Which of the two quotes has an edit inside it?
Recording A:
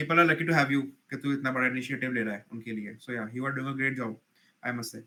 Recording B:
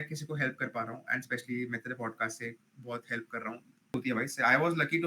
B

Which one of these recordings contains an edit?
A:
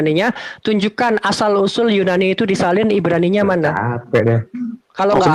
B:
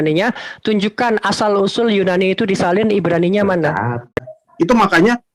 B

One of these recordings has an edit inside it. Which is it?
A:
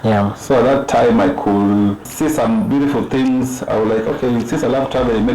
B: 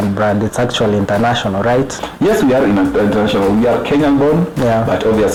A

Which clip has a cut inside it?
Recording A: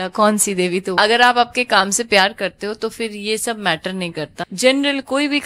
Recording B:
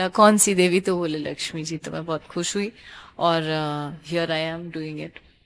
A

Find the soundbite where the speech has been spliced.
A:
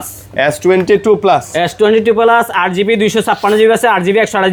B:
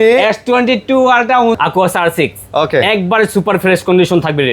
B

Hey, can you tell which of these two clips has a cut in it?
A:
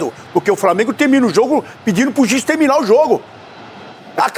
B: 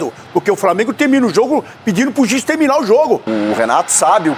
B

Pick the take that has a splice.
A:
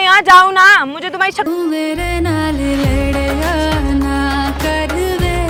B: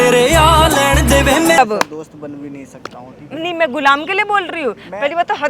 B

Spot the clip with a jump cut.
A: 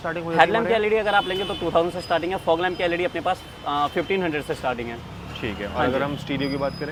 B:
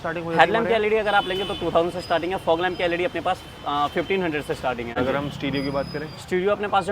B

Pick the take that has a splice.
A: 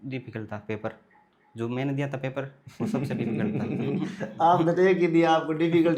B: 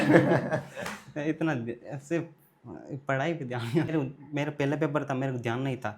B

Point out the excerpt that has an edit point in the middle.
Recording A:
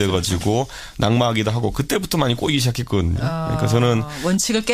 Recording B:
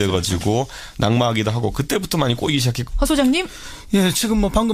A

